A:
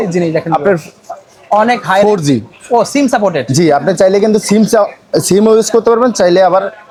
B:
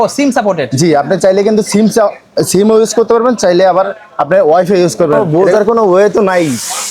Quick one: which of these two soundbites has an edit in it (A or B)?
B